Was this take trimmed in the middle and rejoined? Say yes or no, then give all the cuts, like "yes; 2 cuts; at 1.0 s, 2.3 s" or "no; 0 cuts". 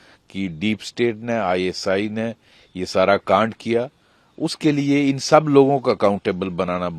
no; 0 cuts